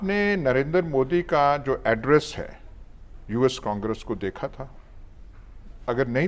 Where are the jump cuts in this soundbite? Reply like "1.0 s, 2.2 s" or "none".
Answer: none